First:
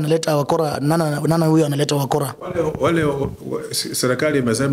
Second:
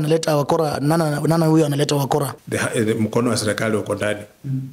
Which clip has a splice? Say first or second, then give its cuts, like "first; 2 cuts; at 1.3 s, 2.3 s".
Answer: second; 1 cut; at 2.4 s